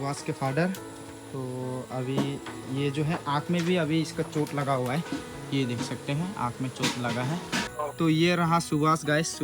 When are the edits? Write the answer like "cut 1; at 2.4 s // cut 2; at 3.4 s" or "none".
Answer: cut 1; at 7.8 s